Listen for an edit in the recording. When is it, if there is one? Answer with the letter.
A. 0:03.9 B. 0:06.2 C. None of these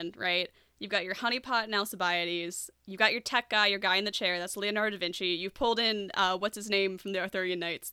C